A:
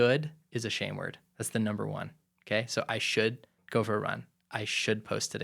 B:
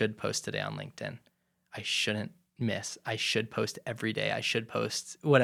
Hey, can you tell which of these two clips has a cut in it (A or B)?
A